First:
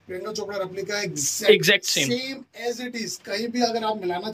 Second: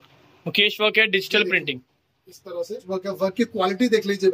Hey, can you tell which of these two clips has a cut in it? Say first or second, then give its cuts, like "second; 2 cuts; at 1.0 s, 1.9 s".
second; 1 cut; at 2.8 s